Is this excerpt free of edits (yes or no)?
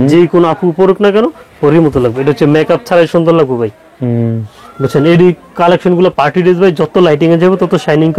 yes